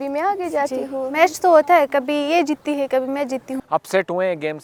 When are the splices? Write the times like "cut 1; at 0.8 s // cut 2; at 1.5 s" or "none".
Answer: none